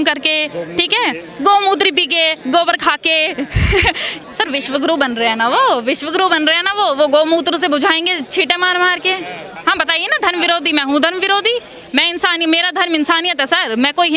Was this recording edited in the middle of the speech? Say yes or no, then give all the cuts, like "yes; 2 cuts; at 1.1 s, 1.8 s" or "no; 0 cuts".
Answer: yes; 2 cuts; at 4.1 s, 9.5 s